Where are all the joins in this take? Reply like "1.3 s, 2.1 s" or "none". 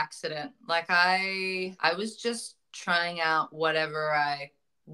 1.8 s